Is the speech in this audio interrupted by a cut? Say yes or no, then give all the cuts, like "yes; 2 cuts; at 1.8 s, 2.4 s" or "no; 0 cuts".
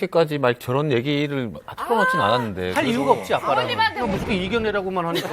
no; 0 cuts